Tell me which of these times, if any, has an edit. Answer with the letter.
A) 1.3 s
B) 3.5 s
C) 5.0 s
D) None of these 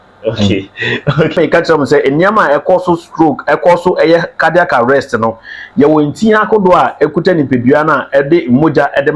A